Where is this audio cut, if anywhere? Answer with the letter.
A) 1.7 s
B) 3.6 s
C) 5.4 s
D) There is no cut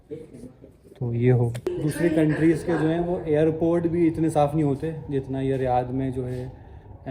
A